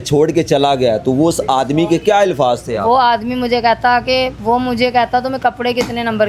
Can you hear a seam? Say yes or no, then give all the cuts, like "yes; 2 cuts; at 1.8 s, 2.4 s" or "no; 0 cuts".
yes; 1 cut; at 4.4 s